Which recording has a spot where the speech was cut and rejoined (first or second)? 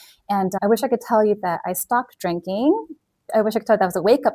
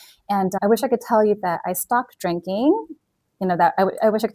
first